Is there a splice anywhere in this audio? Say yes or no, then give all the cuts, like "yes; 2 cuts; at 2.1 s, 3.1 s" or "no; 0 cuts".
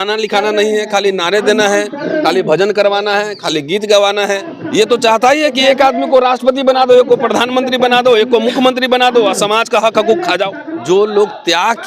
yes; 2 cuts; at 4.5 s, 10.6 s